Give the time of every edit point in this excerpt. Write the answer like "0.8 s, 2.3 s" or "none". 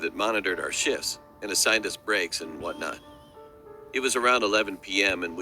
1.6 s